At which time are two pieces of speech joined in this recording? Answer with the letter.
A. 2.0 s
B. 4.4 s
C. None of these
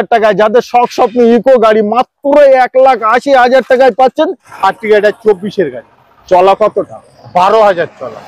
B